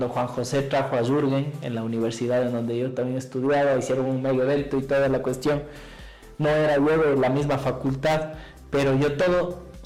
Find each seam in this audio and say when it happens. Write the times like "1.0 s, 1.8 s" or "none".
none